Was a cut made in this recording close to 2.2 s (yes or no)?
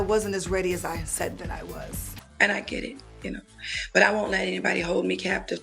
yes